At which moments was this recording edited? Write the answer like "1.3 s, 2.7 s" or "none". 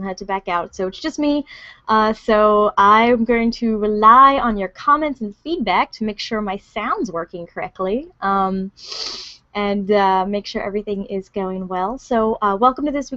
none